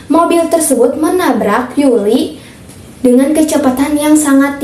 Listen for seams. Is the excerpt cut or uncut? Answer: uncut